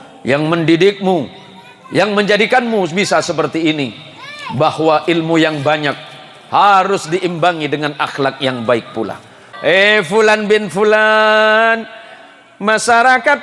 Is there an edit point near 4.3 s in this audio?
no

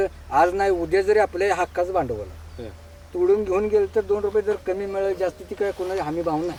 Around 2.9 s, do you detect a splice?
no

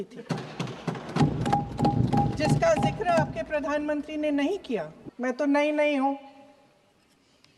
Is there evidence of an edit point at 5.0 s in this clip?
yes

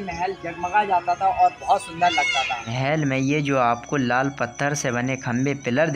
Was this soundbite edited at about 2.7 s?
yes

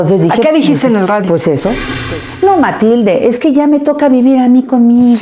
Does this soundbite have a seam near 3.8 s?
no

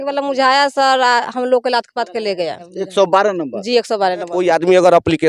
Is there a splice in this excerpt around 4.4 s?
yes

